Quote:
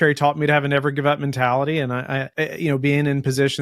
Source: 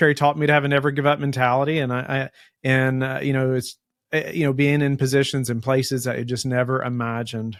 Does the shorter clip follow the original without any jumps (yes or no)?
no